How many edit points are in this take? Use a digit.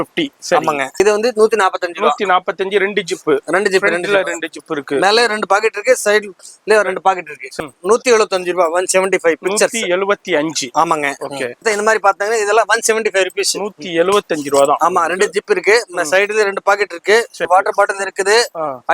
4